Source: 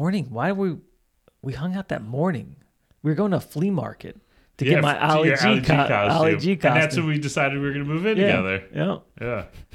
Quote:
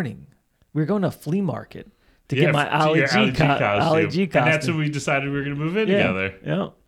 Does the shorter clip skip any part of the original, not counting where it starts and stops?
no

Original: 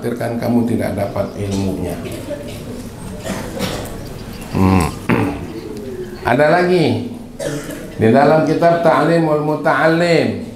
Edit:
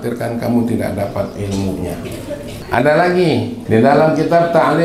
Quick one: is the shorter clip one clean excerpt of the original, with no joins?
no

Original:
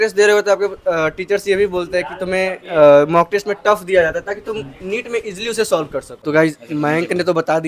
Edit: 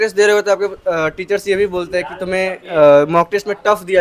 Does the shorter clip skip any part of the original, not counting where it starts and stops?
no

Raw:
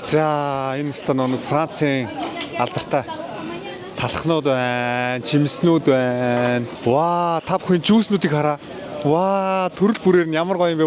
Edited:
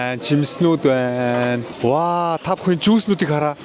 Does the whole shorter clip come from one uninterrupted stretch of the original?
yes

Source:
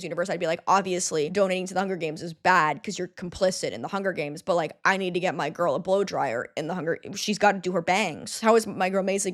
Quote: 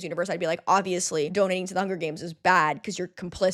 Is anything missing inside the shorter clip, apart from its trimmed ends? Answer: no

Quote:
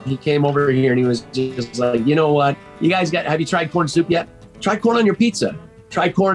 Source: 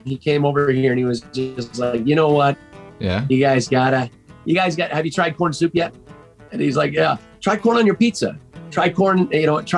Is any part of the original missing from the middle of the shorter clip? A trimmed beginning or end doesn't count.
yes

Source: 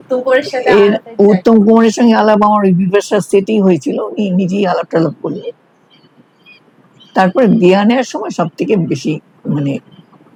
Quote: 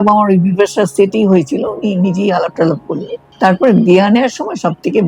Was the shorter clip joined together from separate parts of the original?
yes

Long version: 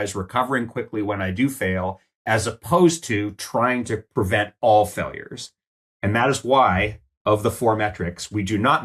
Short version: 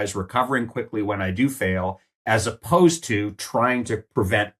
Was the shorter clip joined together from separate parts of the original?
no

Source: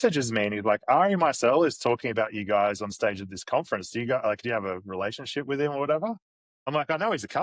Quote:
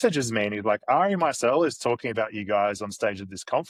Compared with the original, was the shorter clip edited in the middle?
no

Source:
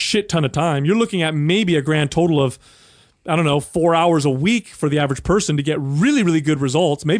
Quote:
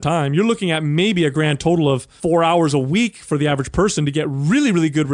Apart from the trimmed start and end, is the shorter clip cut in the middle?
yes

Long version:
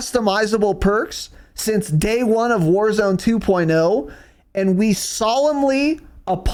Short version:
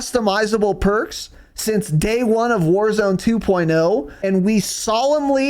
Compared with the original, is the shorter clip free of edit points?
no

